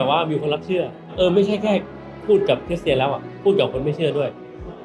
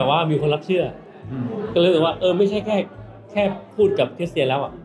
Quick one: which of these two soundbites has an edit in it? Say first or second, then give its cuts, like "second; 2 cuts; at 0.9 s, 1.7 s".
first; 2 cuts; at 1.1 s, 2.1 s